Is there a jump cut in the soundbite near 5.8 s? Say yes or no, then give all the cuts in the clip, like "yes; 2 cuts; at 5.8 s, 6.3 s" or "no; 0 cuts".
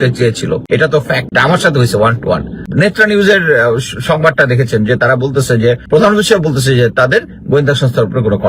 yes; 3 cuts; at 0.8 s, 2.6 s, 5.8 s